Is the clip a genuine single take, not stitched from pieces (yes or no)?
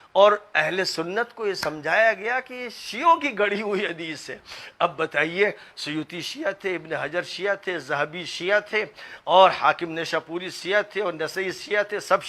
yes